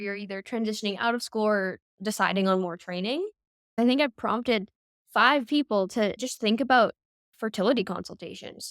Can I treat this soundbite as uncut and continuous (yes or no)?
no